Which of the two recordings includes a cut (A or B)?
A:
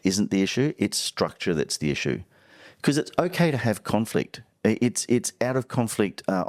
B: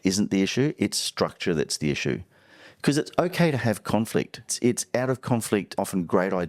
B